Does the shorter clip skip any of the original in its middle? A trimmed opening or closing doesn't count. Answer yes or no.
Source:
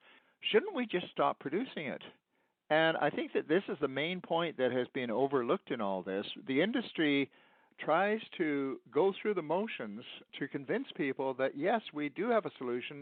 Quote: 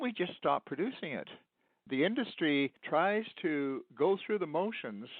yes